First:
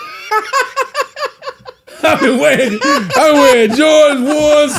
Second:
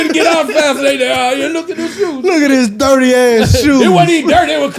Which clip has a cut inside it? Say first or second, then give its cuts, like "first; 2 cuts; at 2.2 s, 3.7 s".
first; 1 cut; at 1.8 s